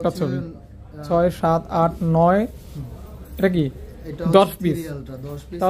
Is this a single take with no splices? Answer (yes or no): no